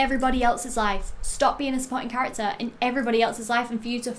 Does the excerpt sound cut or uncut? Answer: uncut